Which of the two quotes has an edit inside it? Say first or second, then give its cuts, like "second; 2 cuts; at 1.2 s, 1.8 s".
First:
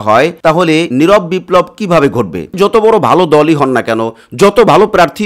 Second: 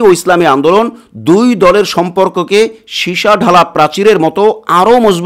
first; 2 cuts; at 0.7 s, 2.5 s